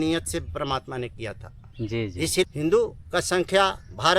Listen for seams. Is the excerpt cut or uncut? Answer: cut